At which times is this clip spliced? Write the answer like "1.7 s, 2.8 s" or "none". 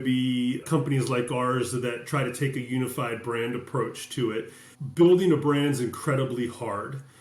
4.7 s